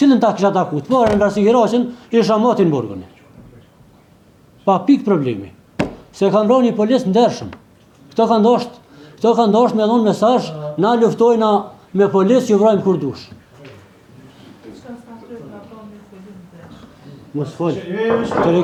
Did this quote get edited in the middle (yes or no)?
no